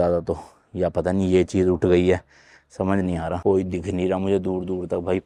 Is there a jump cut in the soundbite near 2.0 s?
no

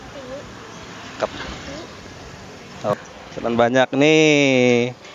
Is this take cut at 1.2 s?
no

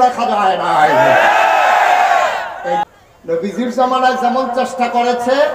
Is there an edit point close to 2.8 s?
yes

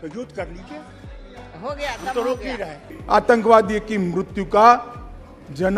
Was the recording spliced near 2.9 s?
yes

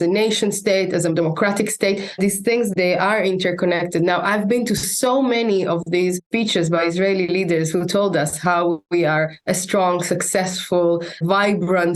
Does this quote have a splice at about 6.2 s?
yes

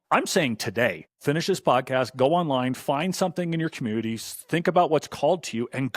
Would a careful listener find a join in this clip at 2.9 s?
no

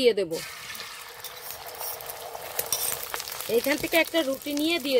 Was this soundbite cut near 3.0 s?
yes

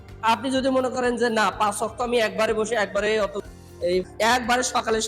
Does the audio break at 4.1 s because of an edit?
yes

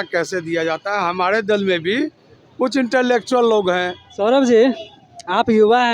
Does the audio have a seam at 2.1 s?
no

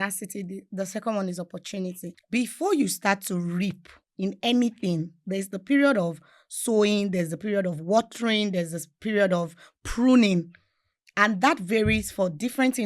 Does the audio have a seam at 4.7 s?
no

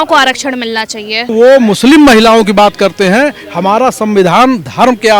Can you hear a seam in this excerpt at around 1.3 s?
yes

